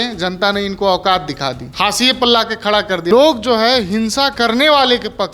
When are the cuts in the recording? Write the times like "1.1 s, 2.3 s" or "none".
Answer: 1.6 s, 3.1 s